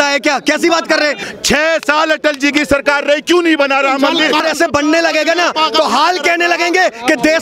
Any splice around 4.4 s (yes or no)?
yes